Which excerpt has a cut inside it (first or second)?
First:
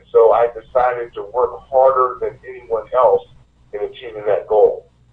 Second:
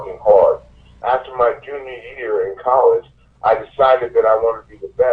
second